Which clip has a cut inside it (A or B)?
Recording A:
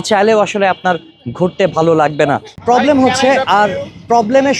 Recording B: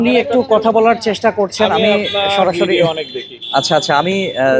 A